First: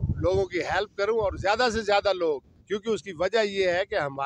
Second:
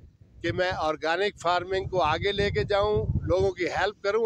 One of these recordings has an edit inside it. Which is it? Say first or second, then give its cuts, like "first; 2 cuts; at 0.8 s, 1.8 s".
first; 1 cut; at 2.5 s